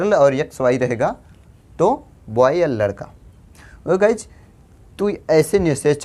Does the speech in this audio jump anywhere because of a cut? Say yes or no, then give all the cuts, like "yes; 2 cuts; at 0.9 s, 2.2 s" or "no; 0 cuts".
no; 0 cuts